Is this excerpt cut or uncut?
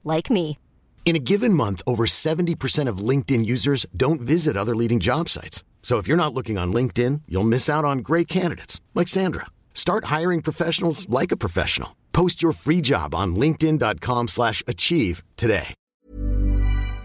cut